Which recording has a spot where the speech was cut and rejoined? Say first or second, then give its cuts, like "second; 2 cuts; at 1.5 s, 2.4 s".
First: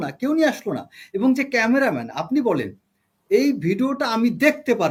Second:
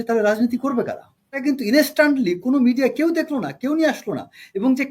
second; 1 cut; at 1.4 s